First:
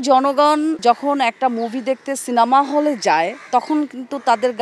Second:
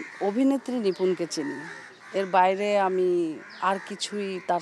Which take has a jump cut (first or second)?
first